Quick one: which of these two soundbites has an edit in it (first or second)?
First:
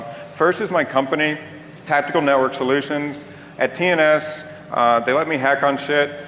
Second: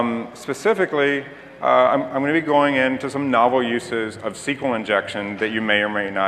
second